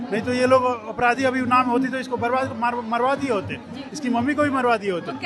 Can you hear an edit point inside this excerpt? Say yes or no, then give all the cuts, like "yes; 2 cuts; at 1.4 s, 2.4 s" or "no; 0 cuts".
no; 0 cuts